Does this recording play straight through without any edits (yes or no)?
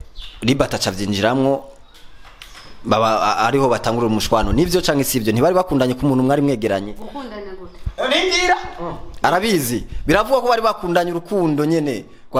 yes